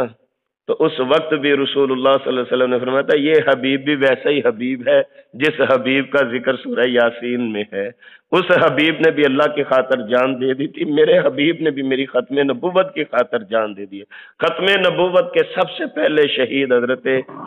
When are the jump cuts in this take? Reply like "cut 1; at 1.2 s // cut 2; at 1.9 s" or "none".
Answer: none